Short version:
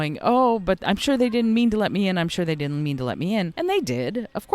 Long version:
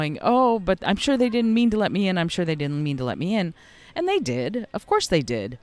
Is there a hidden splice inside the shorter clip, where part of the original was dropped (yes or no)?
yes